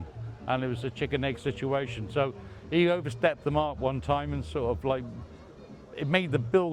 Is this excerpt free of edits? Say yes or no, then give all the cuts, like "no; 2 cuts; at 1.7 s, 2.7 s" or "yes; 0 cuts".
yes; 0 cuts